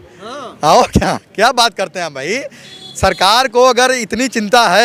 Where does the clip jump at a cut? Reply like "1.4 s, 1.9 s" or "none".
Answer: none